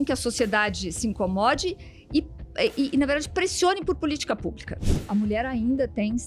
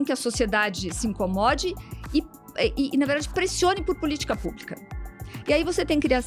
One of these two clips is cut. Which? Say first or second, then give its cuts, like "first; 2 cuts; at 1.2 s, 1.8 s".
first; 1 cut; at 5.0 s